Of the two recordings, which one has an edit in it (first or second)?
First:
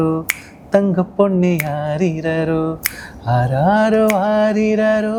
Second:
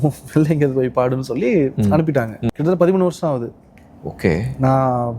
second